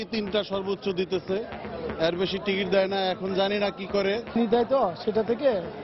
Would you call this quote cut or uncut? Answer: cut